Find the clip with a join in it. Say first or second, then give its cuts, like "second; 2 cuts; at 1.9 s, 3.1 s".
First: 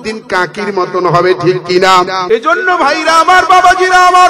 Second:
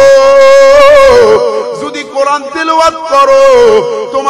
first; 1 cut; at 2.2 s